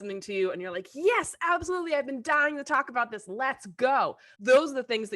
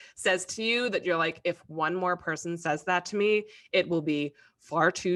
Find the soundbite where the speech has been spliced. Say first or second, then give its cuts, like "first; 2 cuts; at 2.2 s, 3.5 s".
first; 1 cut; at 4.3 s